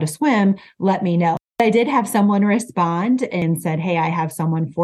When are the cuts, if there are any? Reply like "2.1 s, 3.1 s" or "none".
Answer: 1.5 s, 3.4 s